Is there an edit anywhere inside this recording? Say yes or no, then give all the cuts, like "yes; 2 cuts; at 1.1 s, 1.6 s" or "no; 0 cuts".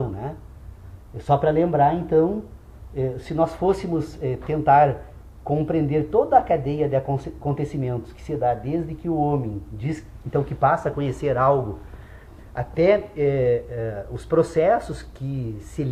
no; 0 cuts